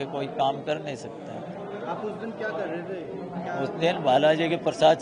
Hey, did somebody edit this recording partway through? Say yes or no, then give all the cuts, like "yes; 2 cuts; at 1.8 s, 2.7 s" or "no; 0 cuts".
no; 0 cuts